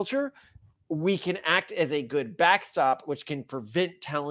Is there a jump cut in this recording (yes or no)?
no